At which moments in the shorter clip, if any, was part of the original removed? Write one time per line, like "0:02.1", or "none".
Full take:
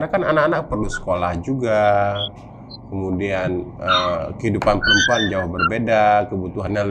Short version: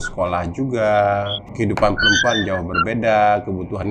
0:01.5